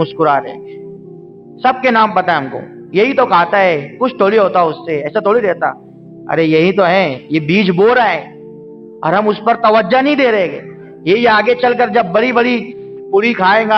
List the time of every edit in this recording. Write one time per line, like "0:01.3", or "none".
none